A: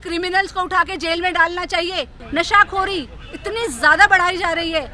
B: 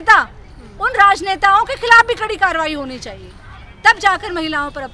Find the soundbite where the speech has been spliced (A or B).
A